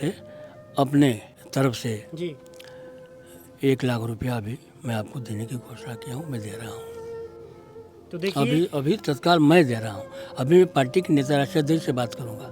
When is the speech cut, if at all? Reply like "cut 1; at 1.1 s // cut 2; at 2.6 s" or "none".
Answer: cut 1; at 1.3 s